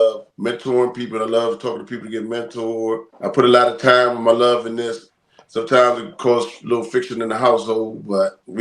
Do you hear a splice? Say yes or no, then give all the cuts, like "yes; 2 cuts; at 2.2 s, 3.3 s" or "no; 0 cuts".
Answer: no; 0 cuts